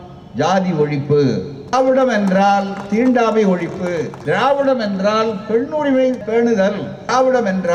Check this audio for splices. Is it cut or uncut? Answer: cut